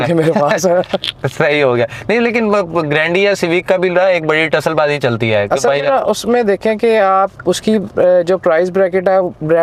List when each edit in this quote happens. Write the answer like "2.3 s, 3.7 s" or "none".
none